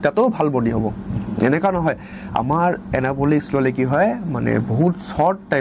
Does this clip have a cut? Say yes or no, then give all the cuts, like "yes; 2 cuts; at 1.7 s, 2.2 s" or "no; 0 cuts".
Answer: no; 0 cuts